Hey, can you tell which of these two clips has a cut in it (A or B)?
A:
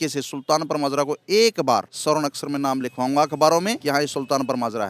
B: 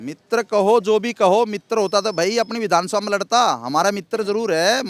A